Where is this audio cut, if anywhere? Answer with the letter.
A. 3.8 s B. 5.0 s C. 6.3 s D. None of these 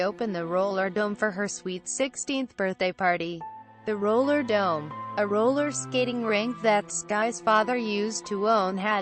C